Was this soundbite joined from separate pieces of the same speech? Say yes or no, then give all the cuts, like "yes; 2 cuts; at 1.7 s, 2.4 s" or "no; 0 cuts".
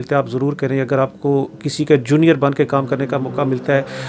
no; 0 cuts